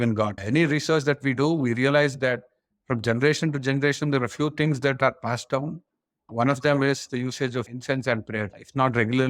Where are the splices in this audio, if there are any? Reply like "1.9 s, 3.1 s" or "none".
none